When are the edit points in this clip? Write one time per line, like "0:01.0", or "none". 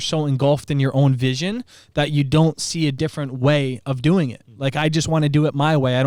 none